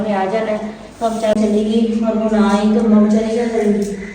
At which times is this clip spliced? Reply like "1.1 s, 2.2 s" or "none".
1.4 s